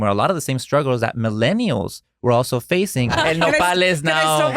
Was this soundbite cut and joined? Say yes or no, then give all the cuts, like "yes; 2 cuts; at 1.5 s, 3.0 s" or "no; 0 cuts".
yes; 1 cut; at 3.1 s